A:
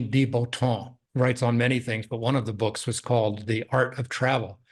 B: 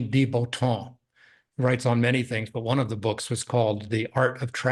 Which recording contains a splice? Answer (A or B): A